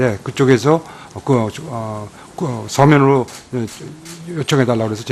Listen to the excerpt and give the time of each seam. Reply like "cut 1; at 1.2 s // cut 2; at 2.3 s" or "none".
none

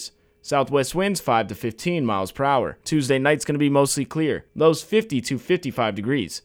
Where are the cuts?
cut 1; at 2.8 s // cut 2; at 4.5 s

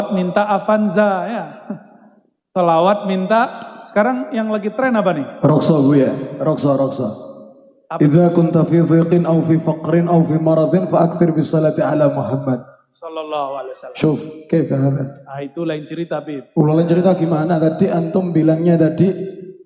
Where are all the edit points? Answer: none

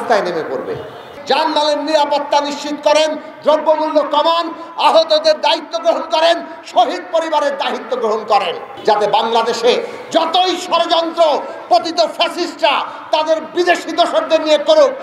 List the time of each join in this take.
cut 1; at 1.1 s // cut 2; at 8.7 s

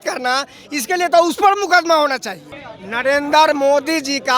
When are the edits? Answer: cut 1; at 2.5 s

